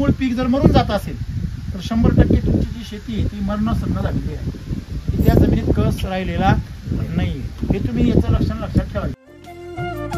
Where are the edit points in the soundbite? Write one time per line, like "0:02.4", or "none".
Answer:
0:09.1